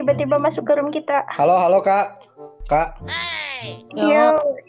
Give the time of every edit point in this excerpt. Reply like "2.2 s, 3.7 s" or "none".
1.3 s